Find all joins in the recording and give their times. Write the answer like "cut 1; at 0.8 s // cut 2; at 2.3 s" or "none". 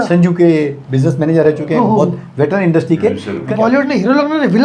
cut 1; at 3.5 s